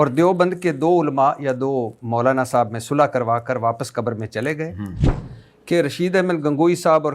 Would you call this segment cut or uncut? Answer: cut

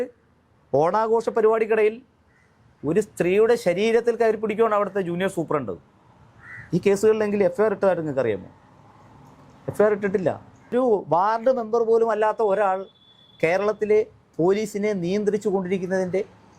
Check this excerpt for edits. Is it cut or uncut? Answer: cut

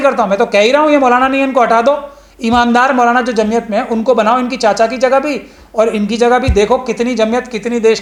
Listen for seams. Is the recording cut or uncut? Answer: uncut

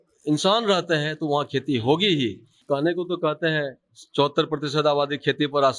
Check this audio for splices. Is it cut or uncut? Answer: cut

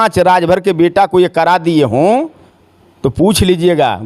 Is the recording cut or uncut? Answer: uncut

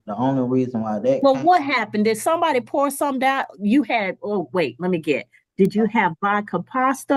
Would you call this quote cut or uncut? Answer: uncut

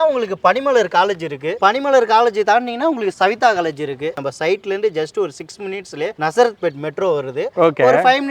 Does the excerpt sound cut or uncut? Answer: cut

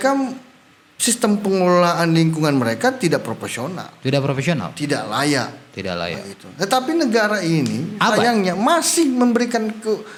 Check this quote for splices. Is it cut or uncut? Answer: uncut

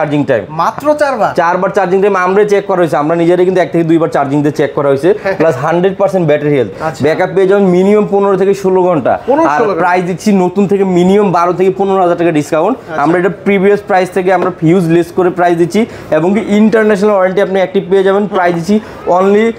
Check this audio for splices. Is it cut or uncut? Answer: uncut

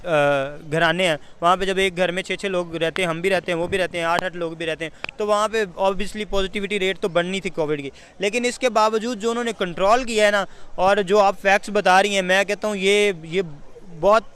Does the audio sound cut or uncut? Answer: uncut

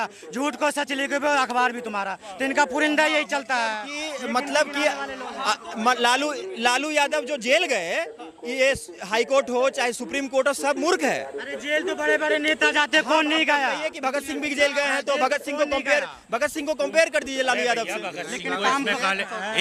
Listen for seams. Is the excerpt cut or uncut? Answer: uncut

